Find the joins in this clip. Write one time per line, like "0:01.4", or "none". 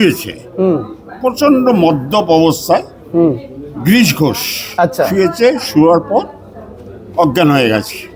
none